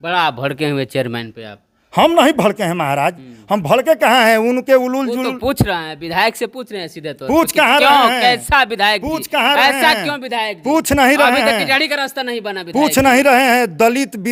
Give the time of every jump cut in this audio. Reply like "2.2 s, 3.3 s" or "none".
none